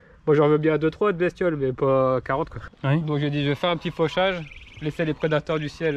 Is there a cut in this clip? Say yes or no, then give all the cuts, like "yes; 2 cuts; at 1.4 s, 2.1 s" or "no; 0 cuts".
yes; 1 cut; at 2.7 s